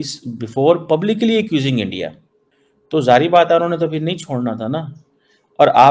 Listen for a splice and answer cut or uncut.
uncut